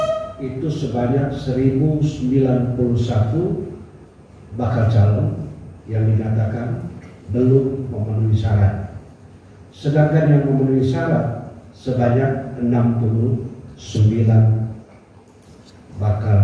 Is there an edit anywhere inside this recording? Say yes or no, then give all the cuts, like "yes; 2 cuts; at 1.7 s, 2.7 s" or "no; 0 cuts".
no; 0 cuts